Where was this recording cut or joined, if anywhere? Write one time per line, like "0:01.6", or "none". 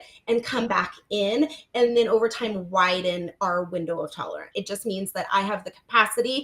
0:04.5